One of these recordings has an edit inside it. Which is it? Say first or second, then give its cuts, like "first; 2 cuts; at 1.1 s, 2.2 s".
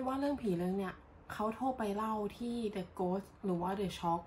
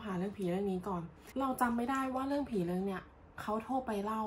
second; 1 cut; at 1.2 s